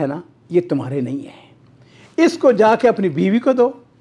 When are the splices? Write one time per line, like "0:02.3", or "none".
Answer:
none